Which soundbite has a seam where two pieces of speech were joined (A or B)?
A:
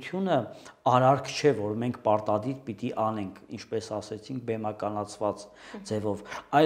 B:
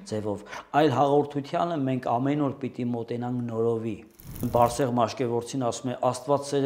B